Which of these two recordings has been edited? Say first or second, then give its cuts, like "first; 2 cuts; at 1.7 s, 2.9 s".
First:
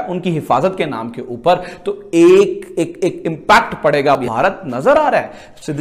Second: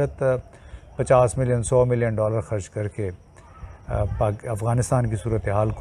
first; 1 cut; at 4.2 s